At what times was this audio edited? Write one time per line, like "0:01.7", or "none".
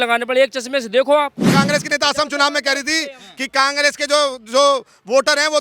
0:01.5

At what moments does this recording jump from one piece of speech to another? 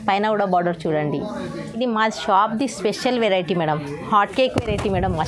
0:01.6

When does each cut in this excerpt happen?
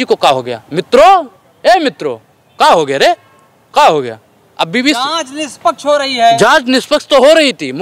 none

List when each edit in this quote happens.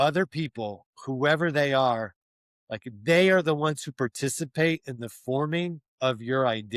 none

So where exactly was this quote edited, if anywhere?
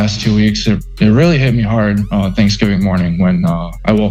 none

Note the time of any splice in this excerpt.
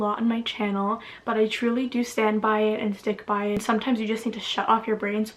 0:03.6

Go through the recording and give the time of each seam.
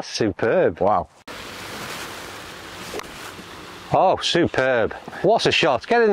0:01.2

